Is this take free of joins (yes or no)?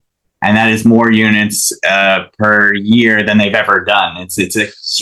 yes